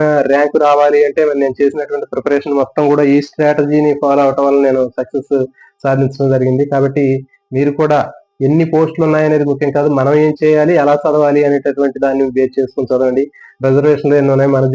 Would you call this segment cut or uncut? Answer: uncut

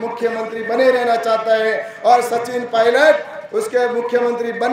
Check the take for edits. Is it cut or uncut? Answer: uncut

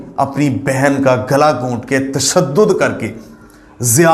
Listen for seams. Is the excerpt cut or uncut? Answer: uncut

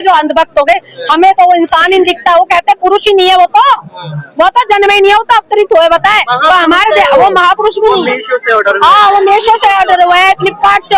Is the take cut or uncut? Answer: uncut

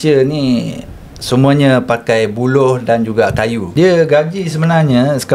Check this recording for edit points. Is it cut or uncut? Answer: cut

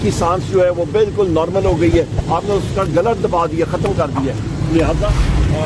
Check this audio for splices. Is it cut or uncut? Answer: uncut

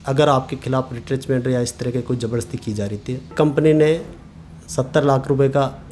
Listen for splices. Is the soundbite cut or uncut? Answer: cut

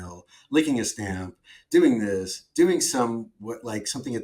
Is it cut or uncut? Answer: uncut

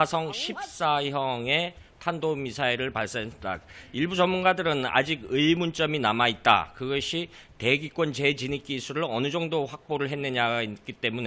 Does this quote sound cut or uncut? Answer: cut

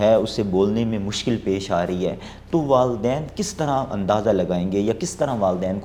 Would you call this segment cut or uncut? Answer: uncut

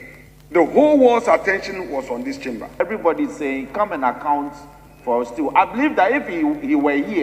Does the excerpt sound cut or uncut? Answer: cut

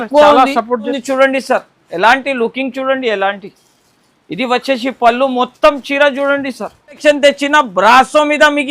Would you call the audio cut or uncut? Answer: cut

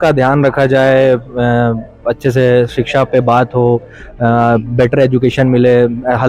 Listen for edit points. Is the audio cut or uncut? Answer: uncut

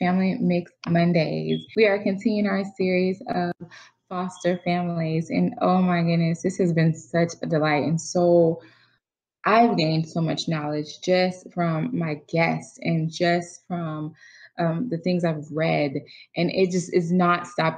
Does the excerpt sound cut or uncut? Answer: cut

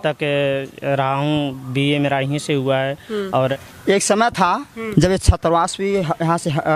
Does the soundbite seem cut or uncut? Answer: cut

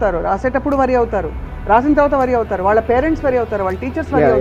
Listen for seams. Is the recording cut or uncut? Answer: uncut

